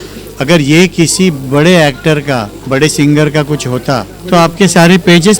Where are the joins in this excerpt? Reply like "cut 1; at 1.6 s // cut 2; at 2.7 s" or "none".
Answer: cut 1; at 2.5 s // cut 2; at 4.1 s